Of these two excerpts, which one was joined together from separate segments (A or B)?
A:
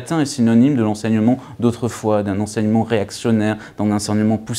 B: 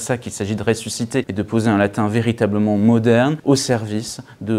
B